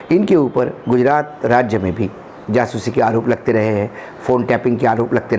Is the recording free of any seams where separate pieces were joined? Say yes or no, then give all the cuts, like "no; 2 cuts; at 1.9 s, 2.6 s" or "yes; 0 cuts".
yes; 0 cuts